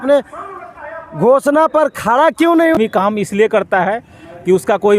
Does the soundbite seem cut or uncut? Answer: cut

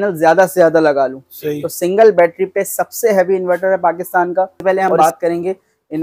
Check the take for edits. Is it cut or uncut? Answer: cut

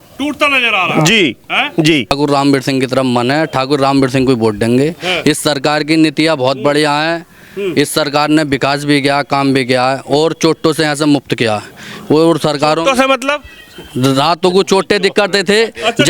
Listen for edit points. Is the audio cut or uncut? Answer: cut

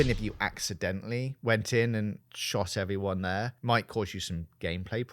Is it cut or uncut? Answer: cut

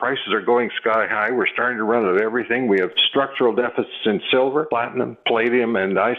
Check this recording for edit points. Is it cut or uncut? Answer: cut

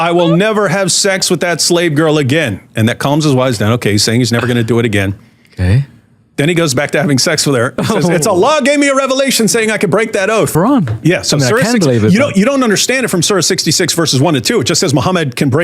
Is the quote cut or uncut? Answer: cut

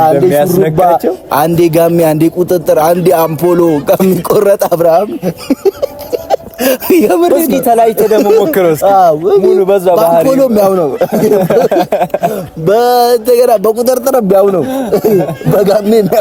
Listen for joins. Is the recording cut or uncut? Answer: uncut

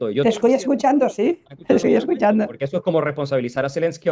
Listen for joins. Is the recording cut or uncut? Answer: uncut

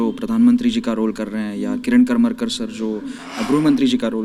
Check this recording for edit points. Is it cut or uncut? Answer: uncut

